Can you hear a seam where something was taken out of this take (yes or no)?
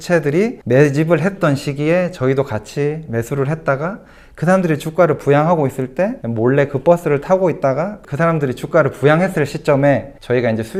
no